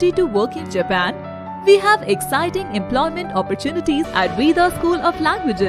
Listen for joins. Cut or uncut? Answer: cut